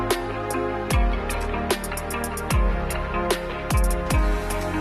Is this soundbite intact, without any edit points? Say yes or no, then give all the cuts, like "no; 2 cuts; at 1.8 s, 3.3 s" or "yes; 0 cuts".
no; 2 cuts; at 2.1 s, 3.7 s